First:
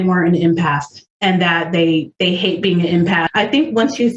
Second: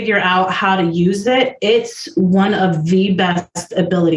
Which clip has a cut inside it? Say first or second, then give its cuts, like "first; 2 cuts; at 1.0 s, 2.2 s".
first; 1 cut; at 3.3 s